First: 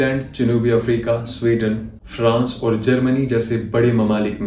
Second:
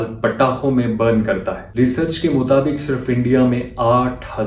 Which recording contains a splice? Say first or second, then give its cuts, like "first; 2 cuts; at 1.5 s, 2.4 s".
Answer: second; 1 cut; at 1.6 s